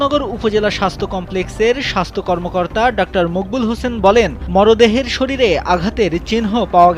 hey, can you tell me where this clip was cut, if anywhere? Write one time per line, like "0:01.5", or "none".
none